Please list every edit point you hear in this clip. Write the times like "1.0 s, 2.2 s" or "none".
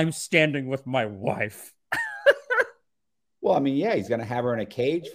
none